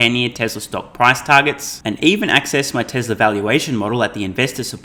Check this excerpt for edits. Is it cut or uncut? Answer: uncut